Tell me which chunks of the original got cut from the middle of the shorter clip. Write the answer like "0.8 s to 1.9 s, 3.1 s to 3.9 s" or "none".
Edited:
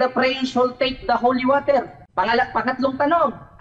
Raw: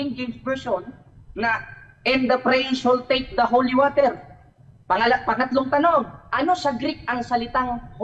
4.3 s to 4.7 s